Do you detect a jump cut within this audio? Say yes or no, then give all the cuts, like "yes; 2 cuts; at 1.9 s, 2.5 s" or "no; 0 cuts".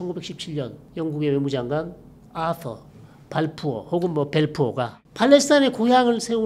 yes; 1 cut; at 5.0 s